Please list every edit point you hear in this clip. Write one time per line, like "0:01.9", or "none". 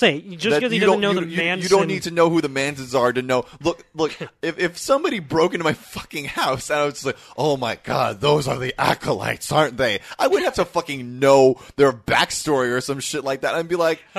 none